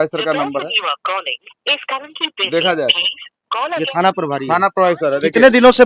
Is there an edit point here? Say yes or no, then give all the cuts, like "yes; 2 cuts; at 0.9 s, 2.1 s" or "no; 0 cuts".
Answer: no; 0 cuts